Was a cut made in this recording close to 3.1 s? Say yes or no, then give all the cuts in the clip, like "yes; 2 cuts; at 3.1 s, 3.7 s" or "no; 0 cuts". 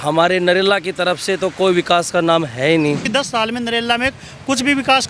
yes; 1 cut; at 3.1 s